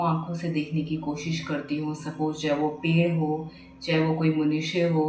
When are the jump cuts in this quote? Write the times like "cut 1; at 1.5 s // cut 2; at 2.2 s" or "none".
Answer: none

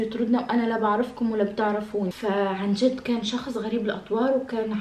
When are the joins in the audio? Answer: cut 1; at 2.1 s

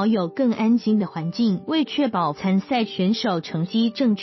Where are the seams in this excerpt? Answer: cut 1; at 1.7 s

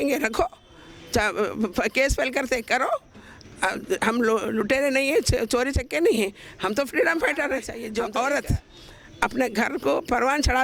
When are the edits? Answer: cut 1; at 7.8 s

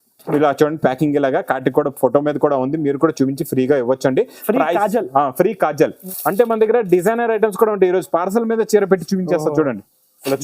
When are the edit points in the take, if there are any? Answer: cut 1; at 6.0 s

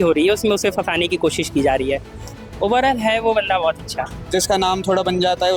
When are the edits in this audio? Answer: cut 1; at 4.3 s

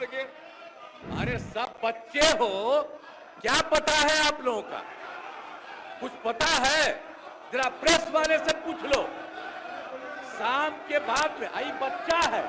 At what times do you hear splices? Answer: cut 1; at 0.9 s

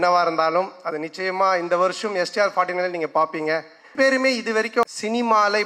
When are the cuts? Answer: cut 1; at 3.9 s // cut 2; at 4.8 s

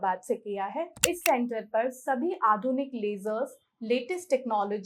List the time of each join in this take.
cut 1; at 0.9 s

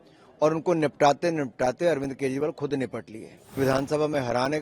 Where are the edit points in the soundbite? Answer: cut 1; at 3.6 s

